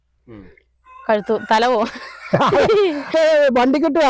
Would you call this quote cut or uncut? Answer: cut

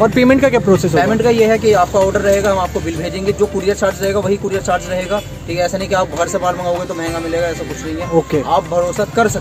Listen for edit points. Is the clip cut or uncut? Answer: uncut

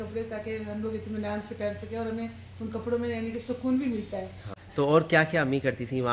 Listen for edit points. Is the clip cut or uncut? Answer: cut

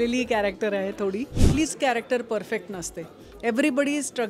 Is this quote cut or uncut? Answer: cut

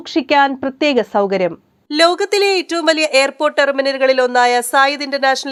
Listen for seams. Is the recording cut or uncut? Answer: uncut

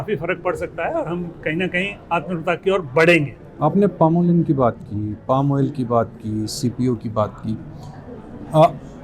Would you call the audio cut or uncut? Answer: uncut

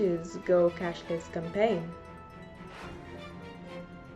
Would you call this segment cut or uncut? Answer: cut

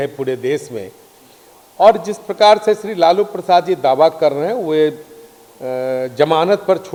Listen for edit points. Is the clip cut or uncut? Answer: uncut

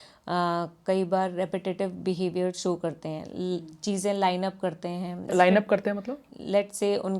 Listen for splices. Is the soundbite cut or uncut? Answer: cut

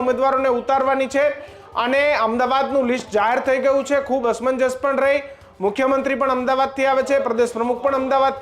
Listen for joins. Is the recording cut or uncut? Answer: uncut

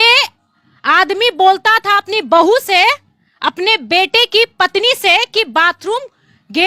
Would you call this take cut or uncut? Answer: uncut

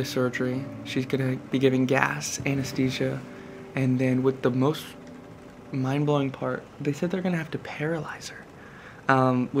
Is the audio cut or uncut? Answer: uncut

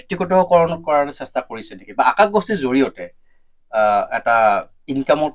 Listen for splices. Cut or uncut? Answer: uncut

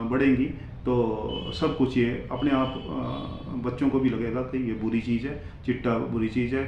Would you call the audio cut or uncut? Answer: uncut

